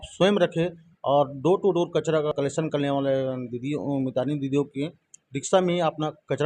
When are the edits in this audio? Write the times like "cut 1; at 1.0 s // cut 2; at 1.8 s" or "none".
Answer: cut 1; at 2.3 s